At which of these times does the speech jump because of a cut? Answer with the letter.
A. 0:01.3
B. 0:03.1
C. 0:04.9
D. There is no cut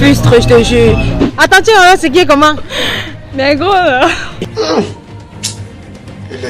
A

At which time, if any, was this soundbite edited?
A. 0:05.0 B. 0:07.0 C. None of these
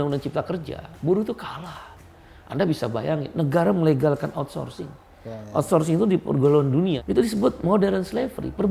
B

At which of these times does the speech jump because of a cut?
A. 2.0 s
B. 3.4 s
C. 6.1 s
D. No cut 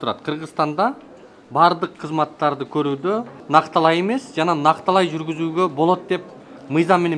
B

